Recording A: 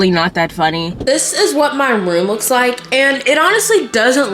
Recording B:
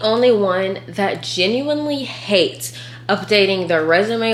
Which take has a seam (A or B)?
A